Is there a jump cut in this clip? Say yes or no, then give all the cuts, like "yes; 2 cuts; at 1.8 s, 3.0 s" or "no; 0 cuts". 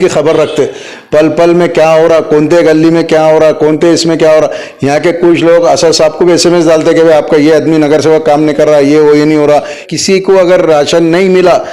yes; 1 cut; at 9.8 s